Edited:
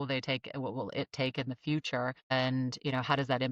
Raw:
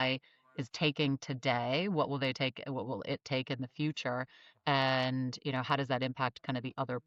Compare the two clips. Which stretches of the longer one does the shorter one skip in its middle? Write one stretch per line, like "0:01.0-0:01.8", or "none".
0:04.4-0:04.9